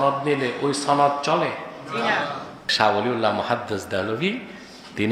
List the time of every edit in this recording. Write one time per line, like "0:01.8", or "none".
0:02.6